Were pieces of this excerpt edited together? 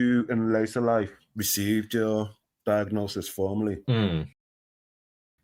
no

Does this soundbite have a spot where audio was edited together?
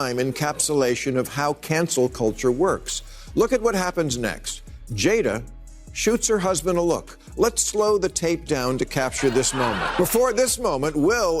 yes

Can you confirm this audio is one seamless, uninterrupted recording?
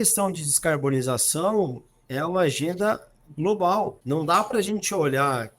no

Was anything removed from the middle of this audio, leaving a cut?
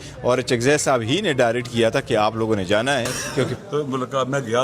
yes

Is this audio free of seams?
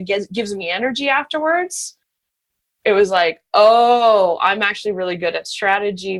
yes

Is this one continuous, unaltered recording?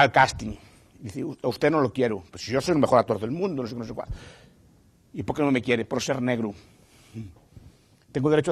yes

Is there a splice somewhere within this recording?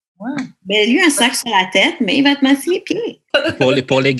yes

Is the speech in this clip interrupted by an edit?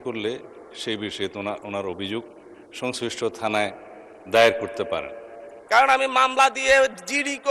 yes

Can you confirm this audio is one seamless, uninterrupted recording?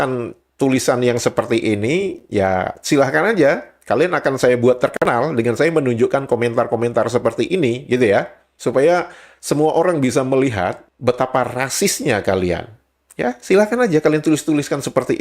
no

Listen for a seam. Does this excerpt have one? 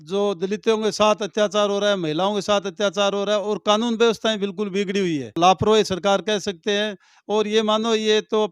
yes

